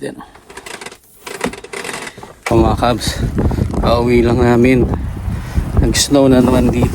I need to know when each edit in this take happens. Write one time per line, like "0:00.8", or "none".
0:02.4